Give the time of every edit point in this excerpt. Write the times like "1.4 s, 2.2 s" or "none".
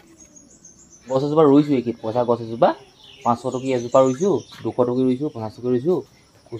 1.2 s